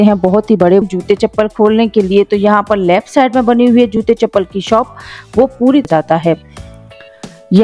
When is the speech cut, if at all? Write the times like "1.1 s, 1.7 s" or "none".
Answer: 0.8 s, 5.9 s